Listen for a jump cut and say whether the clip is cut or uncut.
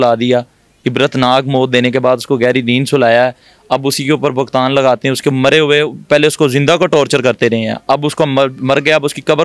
uncut